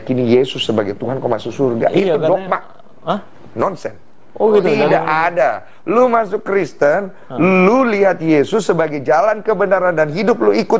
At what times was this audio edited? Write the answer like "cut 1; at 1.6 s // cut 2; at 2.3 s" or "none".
cut 1; at 3.2 s // cut 2; at 4.6 s